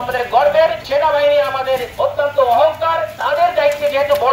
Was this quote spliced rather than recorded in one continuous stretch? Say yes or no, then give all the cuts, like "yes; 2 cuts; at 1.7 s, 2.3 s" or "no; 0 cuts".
yes; 3 cuts; at 0.8 s, 1.9 s, 3.1 s